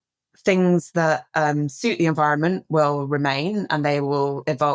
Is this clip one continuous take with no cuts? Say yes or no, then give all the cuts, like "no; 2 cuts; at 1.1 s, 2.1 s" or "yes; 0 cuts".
yes; 0 cuts